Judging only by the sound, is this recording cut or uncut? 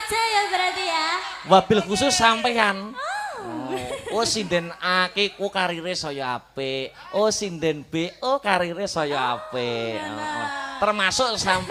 uncut